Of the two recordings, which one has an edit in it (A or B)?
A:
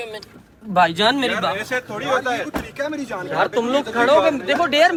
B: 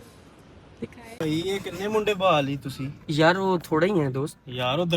B